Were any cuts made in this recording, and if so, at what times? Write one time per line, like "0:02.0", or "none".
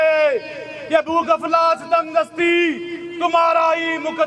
none